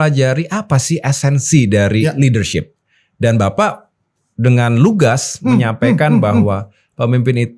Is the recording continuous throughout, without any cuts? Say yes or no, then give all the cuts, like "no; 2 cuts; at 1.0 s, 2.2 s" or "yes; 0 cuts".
yes; 0 cuts